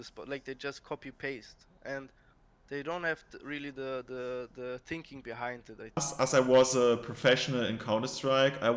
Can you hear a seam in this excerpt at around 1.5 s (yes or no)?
no